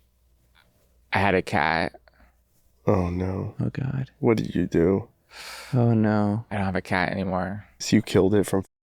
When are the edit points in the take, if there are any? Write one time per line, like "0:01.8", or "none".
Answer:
0:07.7